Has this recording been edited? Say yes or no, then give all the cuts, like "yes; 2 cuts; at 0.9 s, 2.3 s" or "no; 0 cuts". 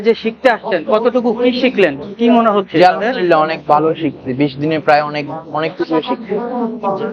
no; 0 cuts